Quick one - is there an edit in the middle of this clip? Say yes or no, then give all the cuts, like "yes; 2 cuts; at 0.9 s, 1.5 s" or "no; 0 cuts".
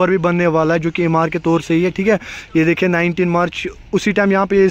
no; 0 cuts